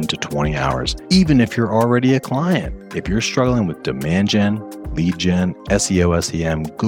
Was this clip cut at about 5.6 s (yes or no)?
no